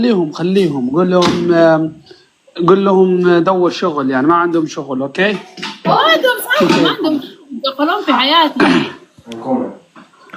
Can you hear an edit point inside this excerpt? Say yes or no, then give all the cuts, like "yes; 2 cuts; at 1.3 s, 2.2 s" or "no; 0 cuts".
no; 0 cuts